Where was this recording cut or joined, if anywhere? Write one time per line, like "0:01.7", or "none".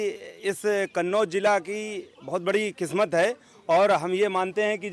none

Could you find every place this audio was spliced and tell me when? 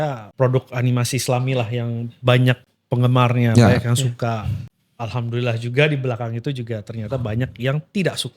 0:04.6

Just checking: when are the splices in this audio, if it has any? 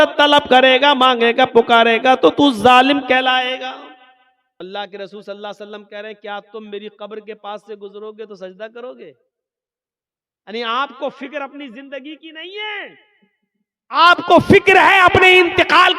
0:04.6

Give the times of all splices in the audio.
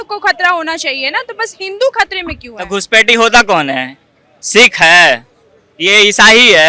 none

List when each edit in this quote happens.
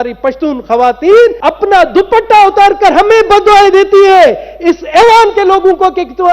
0:01.4

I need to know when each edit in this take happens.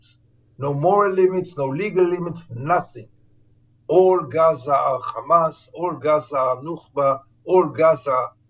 none

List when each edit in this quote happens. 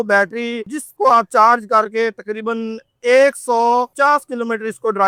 none

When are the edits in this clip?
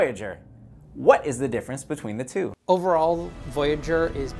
0:02.2

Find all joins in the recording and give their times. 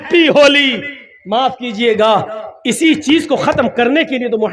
none

